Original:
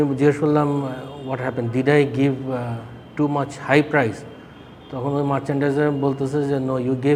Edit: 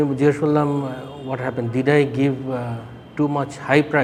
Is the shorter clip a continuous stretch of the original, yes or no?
yes